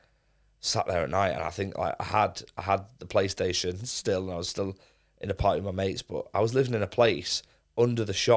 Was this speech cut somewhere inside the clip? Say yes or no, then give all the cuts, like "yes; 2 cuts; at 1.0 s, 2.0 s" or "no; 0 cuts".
no; 0 cuts